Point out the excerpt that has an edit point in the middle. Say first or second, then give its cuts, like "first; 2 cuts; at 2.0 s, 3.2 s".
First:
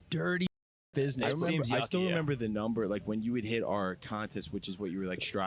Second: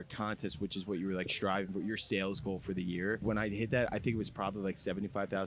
second; 1 cut; at 3.2 s